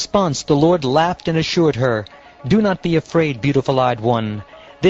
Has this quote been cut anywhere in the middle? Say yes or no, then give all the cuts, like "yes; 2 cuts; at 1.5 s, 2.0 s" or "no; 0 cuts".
no; 0 cuts